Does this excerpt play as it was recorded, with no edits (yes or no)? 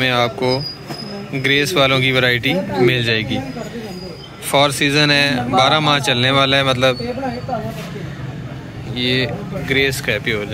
yes